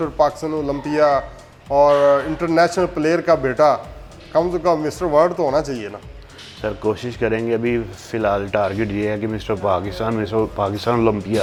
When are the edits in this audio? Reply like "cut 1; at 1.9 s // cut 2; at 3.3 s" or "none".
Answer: none